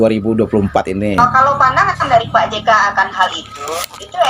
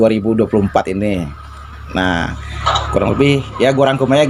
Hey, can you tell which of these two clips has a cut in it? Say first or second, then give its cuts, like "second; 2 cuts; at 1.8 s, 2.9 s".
first; 1 cut; at 1.2 s